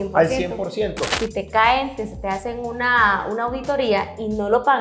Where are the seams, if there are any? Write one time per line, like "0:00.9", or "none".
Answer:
0:01.1